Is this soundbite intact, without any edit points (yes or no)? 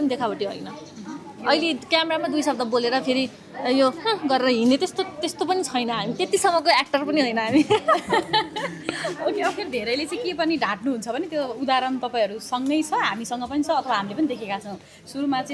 yes